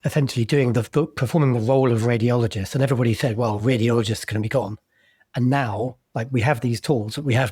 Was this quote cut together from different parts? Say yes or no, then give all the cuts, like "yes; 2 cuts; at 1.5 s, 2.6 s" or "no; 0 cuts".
no; 0 cuts